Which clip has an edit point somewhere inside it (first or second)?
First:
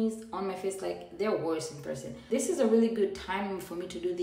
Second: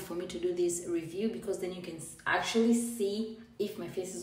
first